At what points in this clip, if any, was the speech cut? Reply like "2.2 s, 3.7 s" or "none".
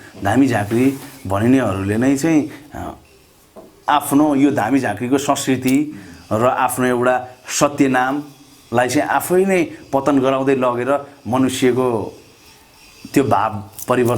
none